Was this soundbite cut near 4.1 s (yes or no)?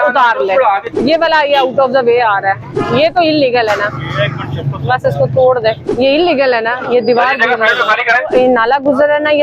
no